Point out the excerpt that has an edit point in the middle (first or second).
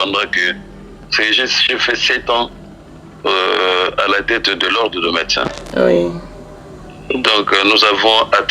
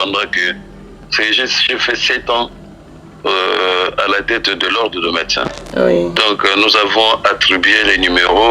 second